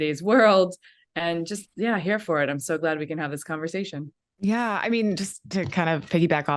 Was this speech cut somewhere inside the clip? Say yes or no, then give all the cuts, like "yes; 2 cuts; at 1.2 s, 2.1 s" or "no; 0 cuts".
no; 0 cuts